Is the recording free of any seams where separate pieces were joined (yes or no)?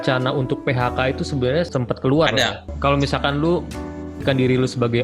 no